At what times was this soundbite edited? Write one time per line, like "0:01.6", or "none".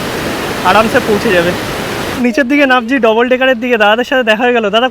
0:02.1

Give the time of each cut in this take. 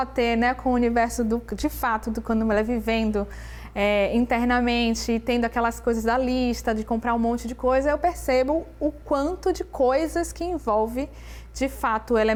none

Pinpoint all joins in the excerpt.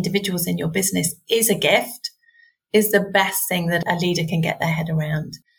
0:03.8

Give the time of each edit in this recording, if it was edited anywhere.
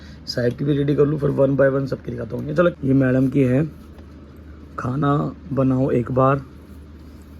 0:02.8

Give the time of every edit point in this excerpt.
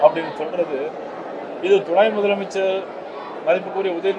none

